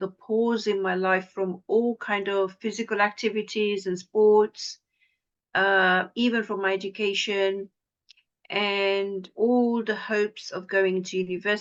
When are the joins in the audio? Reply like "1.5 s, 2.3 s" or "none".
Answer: none